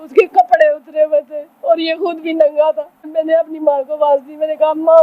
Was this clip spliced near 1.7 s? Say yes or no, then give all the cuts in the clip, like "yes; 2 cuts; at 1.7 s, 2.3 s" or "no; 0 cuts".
no; 1 cut; at 3.0 s